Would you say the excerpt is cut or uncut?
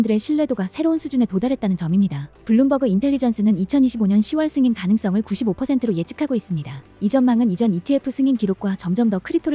cut